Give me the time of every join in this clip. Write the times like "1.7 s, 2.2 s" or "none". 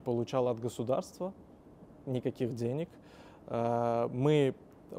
none